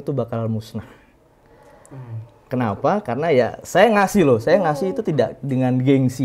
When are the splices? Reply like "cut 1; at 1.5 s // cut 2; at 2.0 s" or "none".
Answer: none